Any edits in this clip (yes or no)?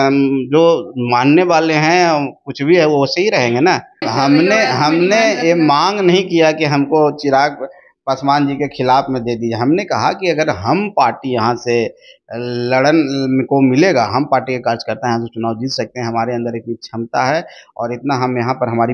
yes